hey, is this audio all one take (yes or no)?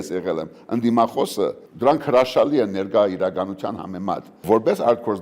no